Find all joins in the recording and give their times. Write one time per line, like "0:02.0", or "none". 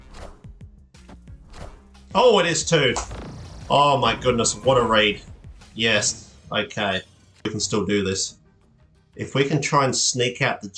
0:07.5